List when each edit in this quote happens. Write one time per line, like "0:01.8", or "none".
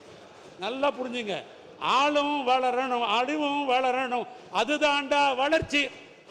none